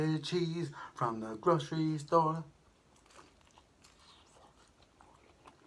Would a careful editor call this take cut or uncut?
uncut